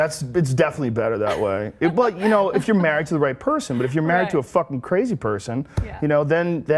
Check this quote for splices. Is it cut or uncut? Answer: uncut